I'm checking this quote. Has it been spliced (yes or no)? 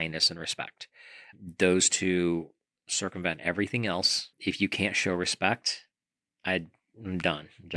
yes